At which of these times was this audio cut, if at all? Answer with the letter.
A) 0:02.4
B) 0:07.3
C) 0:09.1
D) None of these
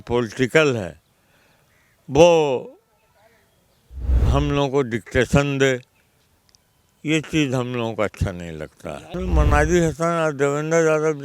C